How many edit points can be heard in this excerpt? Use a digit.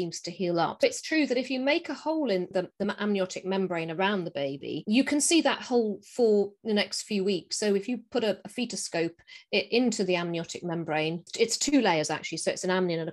2